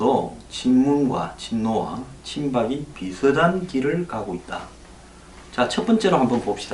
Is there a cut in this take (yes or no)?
yes